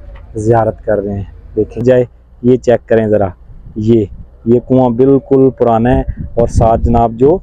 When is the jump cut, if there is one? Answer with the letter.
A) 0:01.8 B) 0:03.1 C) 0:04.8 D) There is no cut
A